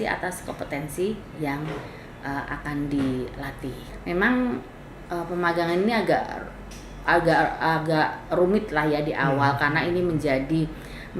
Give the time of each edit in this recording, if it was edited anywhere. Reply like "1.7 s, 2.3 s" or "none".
3.9 s